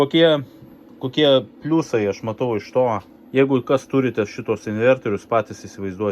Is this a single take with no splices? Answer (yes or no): no